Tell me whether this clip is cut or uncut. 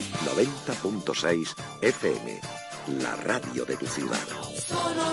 uncut